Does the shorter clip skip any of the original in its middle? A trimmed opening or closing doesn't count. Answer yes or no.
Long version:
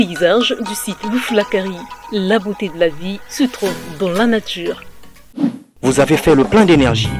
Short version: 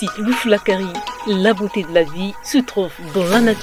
no